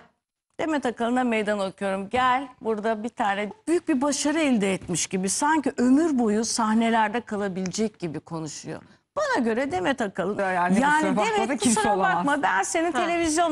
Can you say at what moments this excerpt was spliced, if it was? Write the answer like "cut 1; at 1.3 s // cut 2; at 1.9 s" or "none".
cut 1; at 3.5 s // cut 2; at 10.4 s